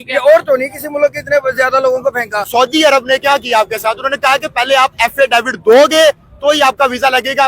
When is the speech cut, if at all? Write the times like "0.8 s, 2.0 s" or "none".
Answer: 2.4 s